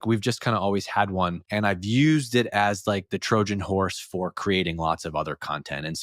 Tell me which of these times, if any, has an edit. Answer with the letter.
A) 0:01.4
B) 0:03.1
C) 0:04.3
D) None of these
A